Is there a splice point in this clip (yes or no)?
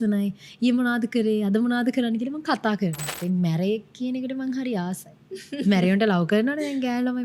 yes